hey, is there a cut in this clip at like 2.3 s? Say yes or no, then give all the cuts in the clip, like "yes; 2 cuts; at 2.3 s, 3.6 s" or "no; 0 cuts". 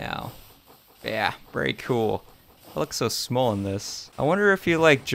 no; 0 cuts